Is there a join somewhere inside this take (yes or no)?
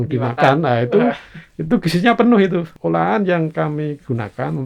yes